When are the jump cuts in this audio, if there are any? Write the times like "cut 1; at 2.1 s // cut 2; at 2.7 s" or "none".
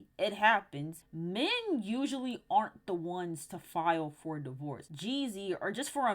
cut 1; at 1.0 s // cut 2; at 4.9 s